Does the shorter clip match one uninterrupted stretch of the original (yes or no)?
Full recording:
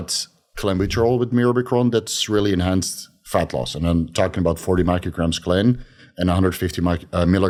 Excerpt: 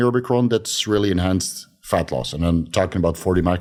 yes